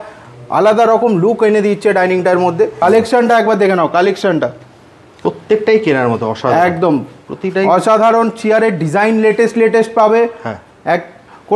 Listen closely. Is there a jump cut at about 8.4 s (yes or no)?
no